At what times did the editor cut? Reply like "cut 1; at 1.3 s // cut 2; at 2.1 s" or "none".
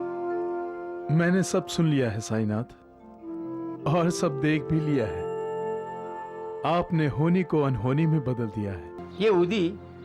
cut 1; at 8.9 s